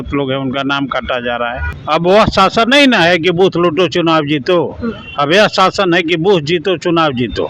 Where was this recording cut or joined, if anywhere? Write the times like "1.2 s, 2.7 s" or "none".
1.7 s